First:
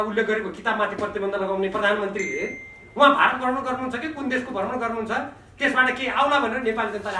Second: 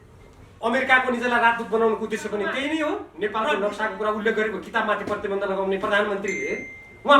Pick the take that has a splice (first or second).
second